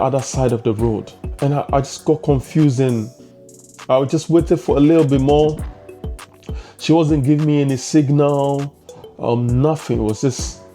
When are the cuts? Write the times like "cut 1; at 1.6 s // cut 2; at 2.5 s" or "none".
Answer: cut 1; at 1.2 s